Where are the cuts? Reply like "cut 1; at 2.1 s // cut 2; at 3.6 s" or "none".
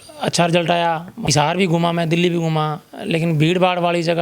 cut 1; at 1.3 s